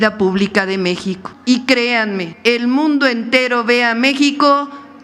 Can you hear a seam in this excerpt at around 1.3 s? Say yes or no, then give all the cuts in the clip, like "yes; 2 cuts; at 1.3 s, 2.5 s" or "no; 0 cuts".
yes; 1 cut; at 1.3 s